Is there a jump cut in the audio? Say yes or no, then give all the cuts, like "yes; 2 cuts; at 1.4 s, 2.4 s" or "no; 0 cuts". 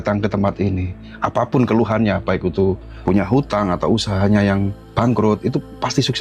yes; 2 cuts; at 2.9 s, 4.8 s